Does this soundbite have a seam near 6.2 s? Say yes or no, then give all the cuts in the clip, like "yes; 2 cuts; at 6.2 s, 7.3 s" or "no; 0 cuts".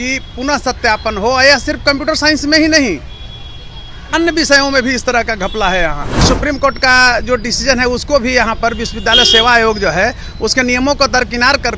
yes; 1 cut; at 6.2 s